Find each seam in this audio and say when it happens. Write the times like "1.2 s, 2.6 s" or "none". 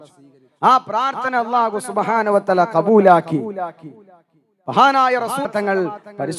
5.5 s